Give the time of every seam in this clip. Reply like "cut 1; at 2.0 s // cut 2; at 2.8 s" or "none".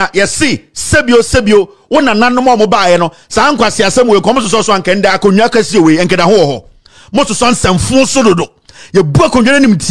none

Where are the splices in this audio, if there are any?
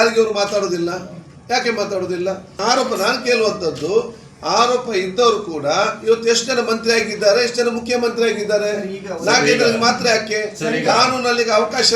cut 1; at 2.5 s

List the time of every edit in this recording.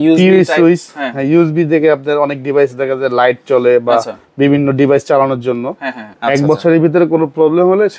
cut 1; at 6.1 s

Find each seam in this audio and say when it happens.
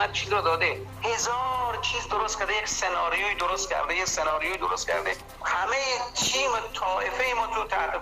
cut 1; at 0.9 s // cut 2; at 5.3 s

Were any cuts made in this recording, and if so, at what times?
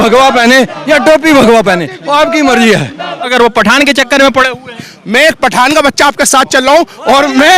cut 1; at 3.3 s

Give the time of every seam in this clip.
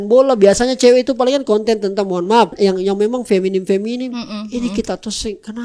cut 1; at 2.5 s

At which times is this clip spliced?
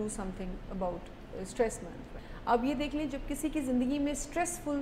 cut 1; at 2.3 s

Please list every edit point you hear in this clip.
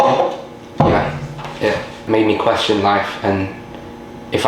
cut 1; at 2.0 s

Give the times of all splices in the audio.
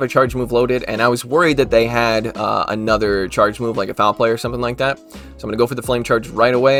none

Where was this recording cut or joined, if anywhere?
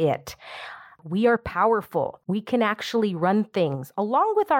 cut 1; at 1.0 s // cut 2; at 2.2 s

